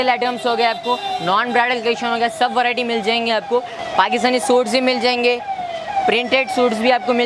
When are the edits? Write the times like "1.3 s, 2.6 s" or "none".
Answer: 3.8 s

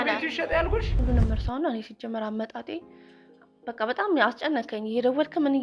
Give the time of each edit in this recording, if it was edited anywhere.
1.0 s

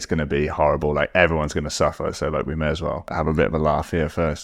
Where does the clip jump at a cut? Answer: 3.1 s

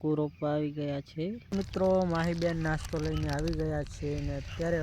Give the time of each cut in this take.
1.5 s

